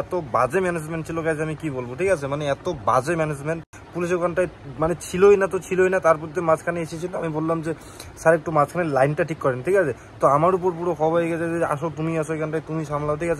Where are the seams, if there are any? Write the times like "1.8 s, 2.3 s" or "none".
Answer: none